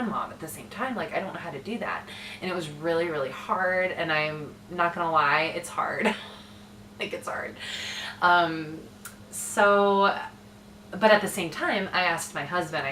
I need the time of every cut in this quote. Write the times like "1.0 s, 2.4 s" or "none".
none